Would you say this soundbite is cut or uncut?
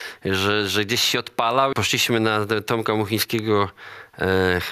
cut